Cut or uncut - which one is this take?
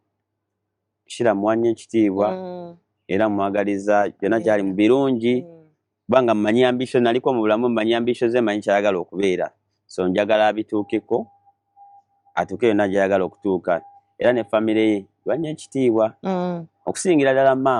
uncut